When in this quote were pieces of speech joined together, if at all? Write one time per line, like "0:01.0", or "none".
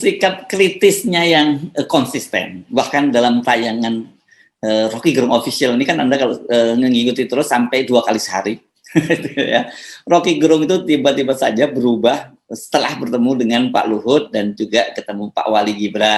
none